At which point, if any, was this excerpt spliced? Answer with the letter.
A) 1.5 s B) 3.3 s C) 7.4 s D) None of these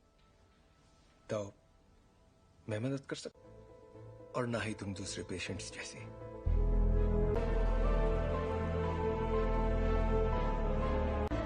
C